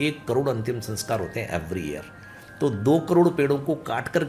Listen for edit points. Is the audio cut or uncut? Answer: uncut